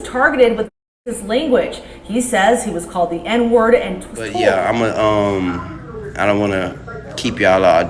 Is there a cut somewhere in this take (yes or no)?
yes